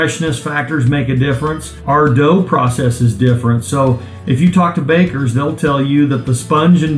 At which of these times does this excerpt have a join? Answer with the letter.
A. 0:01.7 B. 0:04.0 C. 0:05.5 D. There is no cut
A